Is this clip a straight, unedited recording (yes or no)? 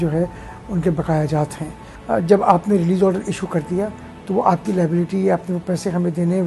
no